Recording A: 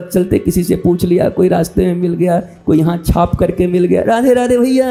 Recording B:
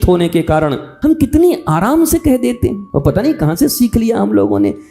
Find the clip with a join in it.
B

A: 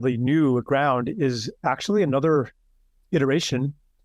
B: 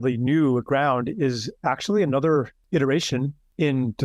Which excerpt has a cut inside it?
B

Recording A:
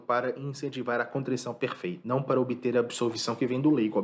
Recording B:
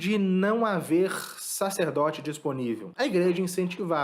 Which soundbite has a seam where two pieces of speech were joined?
B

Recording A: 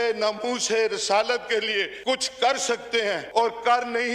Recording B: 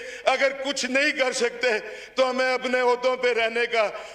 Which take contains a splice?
A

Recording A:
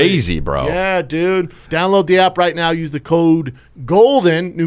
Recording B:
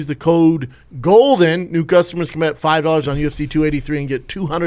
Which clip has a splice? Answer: A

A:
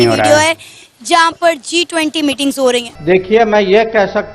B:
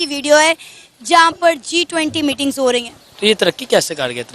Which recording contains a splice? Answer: A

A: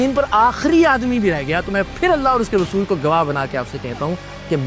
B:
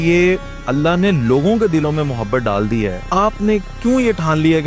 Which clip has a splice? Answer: B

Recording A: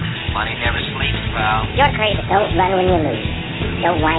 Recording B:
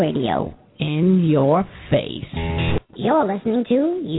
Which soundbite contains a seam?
B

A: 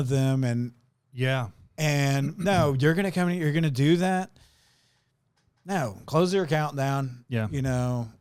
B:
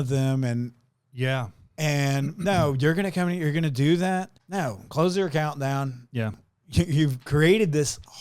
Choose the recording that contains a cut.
B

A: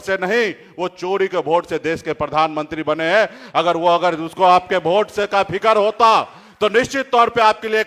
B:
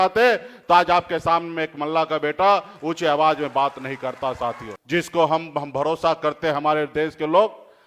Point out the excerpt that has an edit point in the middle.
B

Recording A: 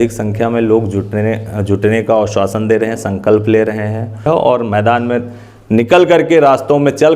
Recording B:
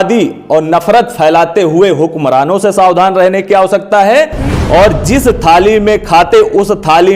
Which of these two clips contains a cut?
A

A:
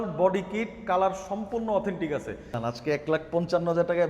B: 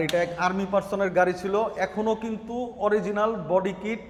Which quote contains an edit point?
A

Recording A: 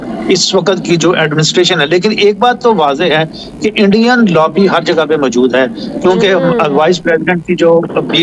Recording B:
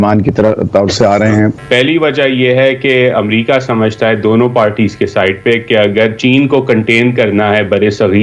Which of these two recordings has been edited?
B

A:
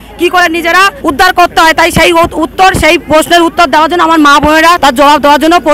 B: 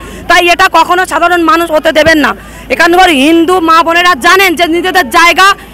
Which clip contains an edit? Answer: A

